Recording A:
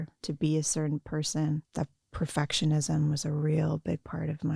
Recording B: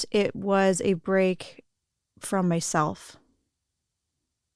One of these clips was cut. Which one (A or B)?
A